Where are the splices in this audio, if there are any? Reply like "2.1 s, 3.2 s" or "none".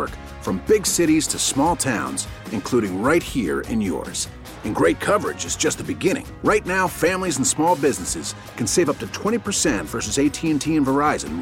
none